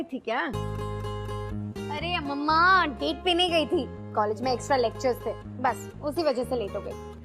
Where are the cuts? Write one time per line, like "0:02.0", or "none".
none